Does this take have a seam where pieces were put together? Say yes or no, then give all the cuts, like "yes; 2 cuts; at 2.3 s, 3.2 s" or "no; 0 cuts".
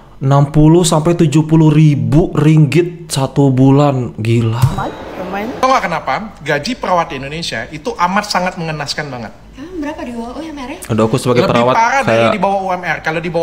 yes; 1 cut; at 5.6 s